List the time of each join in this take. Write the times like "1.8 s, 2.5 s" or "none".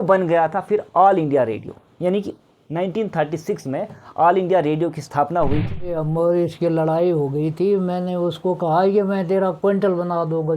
6.0 s